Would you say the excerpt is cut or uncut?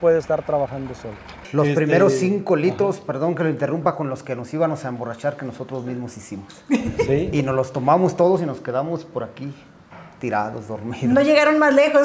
cut